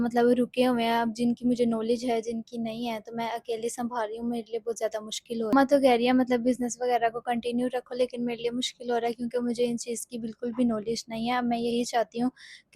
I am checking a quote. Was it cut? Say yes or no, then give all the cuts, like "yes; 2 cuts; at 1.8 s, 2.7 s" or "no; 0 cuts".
yes; 1 cut; at 5.5 s